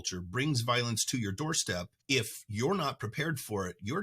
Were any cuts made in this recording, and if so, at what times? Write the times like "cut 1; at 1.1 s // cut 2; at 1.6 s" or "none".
cut 1; at 1.9 s